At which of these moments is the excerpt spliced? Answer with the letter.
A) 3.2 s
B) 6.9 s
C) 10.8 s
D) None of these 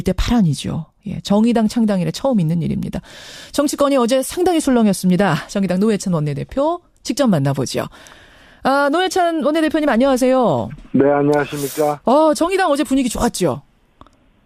B